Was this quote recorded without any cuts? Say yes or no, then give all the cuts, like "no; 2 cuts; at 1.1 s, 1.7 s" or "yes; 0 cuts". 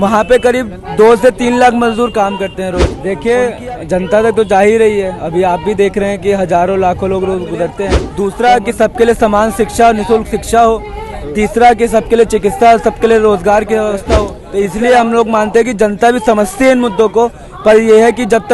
no; 3 cuts; at 2.9 s, 8.0 s, 14.4 s